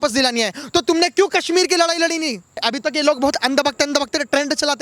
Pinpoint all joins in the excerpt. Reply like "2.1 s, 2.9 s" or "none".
2.7 s